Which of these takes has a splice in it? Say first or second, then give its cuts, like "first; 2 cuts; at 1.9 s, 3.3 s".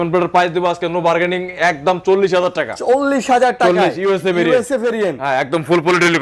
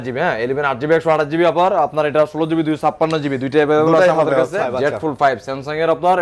second; 1 cut; at 4.6 s